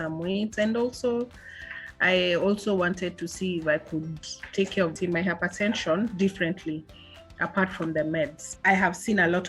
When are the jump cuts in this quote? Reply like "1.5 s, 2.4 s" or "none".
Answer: 4.9 s, 8.4 s